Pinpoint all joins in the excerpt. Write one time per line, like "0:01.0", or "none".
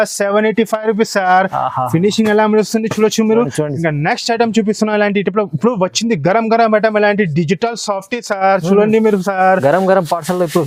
none